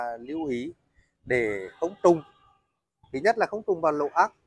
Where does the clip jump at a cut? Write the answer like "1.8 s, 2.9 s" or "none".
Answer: none